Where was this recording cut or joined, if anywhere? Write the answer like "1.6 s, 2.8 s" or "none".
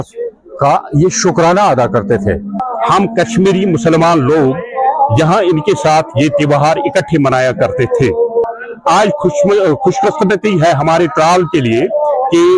2.7 s, 8.4 s